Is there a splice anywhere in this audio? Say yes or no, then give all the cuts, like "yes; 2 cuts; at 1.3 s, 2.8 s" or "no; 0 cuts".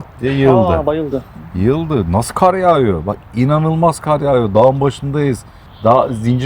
no; 0 cuts